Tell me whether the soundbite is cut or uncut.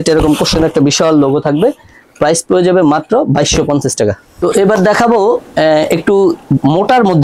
uncut